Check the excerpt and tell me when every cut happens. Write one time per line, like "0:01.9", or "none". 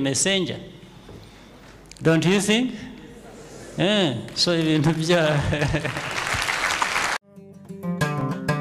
0:07.2